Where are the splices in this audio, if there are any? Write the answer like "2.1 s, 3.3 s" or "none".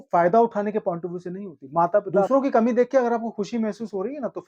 2.3 s